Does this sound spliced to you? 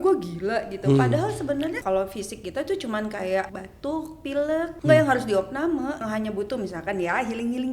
yes; 4 cuts; at 1.8 s, 3.6 s, 4.7 s, 6.0 s

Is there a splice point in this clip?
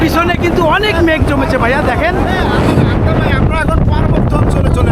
no; 0 cuts

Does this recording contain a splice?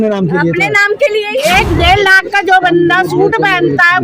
yes; 1 cut; at 1.3 s

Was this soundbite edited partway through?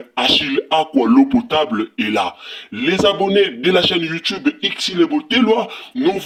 no; 0 cuts

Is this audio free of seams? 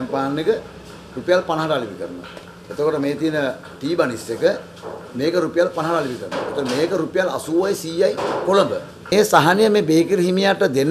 no; 1 cut; at 9.1 s

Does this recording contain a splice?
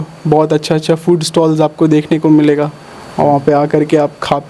no; 0 cuts

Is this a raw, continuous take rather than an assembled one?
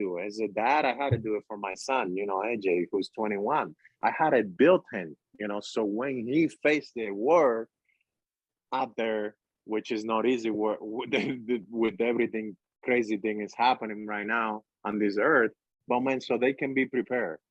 yes; 0 cuts

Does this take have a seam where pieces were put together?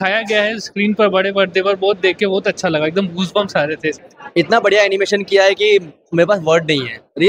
yes; 1 cut; at 3.9 s

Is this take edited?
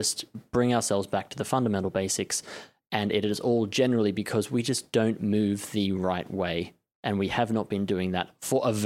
no; 0 cuts

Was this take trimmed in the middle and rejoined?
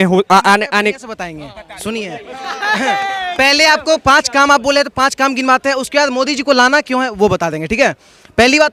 no; 0 cuts

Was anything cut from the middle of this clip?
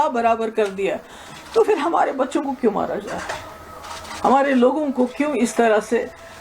no; 0 cuts

